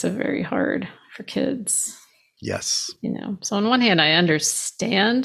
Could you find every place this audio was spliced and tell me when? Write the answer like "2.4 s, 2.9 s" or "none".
none